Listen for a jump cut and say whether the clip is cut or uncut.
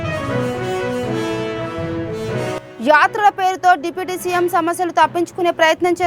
cut